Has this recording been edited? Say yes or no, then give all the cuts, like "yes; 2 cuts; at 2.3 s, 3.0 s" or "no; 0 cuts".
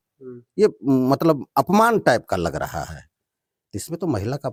no; 0 cuts